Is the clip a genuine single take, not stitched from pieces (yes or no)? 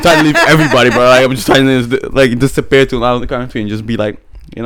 yes